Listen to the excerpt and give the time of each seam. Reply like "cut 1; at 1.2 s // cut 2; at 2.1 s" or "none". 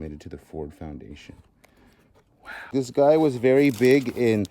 cut 1; at 2.7 s